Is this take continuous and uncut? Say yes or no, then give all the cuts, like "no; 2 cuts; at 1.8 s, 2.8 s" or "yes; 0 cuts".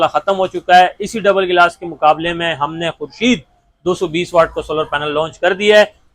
yes; 0 cuts